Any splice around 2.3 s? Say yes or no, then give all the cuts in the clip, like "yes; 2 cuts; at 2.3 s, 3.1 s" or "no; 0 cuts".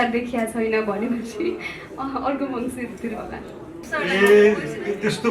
no; 1 cut; at 3.8 s